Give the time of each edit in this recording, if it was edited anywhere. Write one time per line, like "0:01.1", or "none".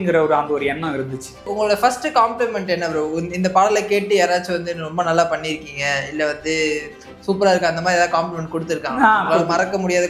0:01.5